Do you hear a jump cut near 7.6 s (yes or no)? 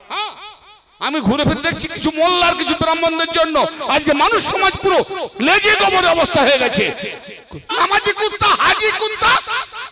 yes